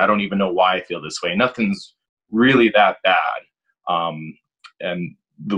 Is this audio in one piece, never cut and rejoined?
yes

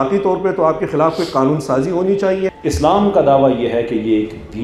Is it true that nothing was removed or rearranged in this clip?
no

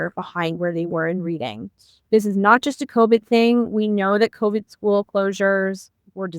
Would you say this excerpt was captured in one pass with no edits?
no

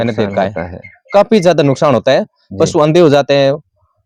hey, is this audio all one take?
yes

